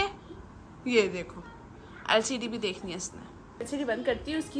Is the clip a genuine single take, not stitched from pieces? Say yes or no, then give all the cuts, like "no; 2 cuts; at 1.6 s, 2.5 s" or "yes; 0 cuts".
no; 1 cut; at 3.6 s